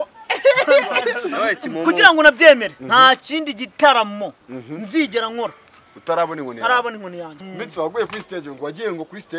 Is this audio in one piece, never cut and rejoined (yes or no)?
no